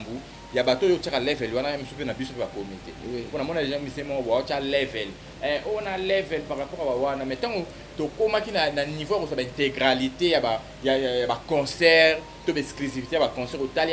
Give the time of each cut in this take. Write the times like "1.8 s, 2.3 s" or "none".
none

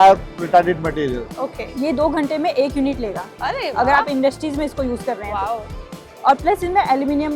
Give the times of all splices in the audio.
1.7 s

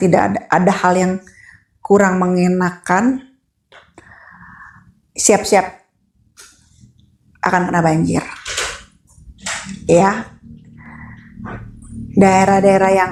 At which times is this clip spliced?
none

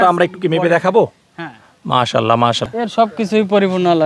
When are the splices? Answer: 2.6 s

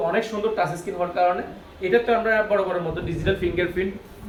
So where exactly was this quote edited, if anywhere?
none

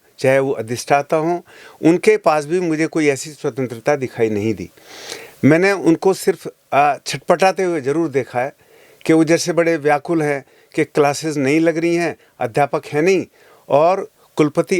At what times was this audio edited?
none

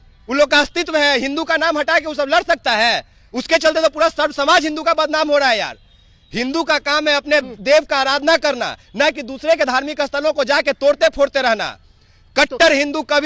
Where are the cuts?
none

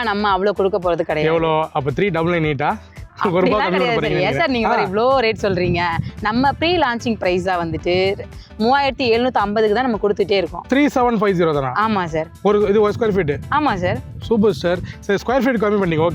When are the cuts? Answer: none

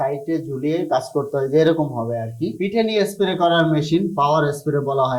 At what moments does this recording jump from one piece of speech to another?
2.4 s

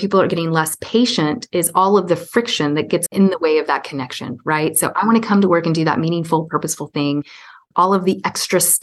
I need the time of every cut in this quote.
3.0 s, 7.7 s

